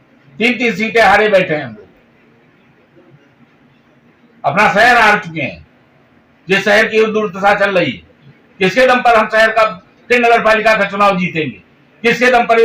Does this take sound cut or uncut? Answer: uncut